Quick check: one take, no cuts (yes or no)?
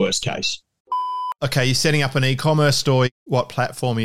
no